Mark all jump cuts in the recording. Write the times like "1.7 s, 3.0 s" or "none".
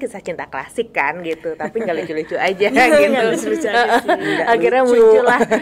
none